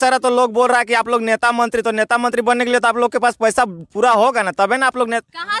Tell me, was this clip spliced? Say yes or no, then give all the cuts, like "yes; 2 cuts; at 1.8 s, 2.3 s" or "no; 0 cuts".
no; 0 cuts